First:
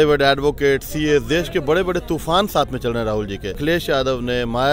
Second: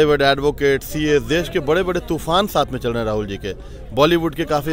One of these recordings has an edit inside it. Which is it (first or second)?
first